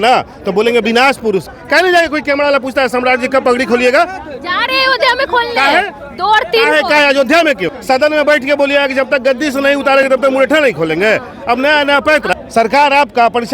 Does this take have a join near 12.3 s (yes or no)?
yes